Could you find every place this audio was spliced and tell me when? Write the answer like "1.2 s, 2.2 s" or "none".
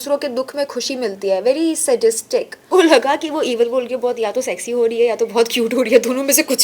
2.6 s